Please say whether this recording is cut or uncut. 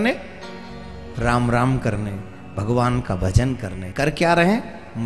cut